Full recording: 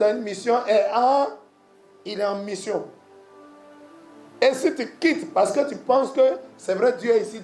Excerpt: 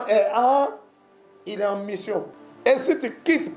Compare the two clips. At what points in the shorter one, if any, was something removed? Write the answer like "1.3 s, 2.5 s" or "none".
2.4 s